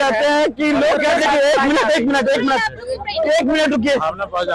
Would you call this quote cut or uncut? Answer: cut